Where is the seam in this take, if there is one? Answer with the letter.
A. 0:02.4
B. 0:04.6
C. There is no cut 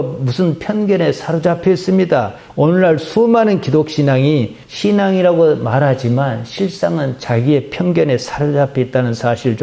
A